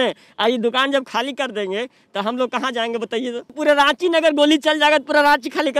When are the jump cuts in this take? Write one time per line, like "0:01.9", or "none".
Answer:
0:03.6